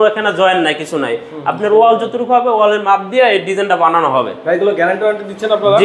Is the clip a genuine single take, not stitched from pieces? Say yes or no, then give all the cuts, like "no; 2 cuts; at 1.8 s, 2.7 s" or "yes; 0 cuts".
yes; 0 cuts